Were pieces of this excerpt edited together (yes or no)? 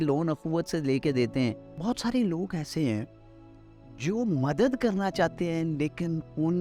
yes